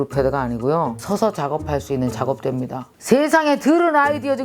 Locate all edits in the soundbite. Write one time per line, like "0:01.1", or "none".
0:01.0
0:02.9